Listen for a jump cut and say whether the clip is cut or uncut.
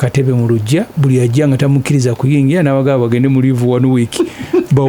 cut